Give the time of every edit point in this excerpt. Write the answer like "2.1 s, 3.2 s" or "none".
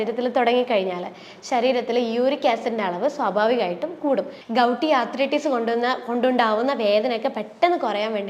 4.4 s